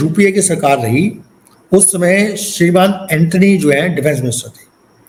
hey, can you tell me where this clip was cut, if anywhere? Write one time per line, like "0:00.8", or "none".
none